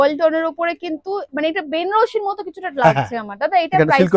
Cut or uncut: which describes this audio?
uncut